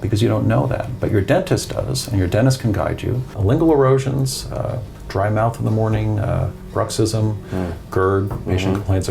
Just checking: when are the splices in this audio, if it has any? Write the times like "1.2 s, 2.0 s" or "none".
3.3 s